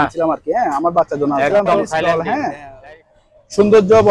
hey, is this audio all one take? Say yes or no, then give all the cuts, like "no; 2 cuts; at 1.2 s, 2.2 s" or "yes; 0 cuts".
no; 1 cut; at 2.0 s